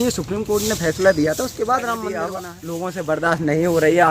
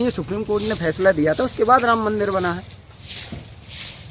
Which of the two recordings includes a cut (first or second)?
first